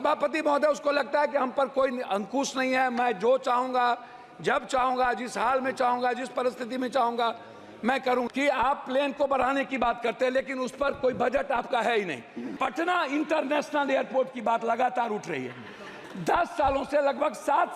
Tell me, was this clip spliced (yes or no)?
yes